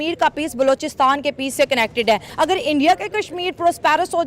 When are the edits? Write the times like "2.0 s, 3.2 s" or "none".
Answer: 2.3 s

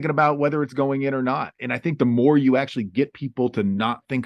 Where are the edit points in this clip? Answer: none

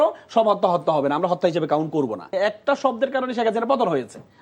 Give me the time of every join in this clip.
2.3 s

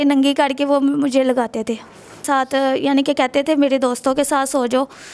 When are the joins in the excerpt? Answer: 2.2 s

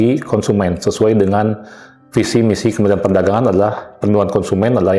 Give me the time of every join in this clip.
none

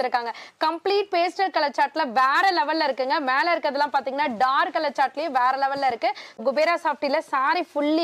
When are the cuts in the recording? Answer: 6.4 s

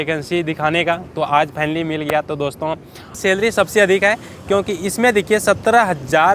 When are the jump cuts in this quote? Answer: 3.2 s

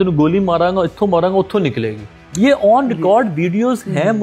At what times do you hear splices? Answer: none

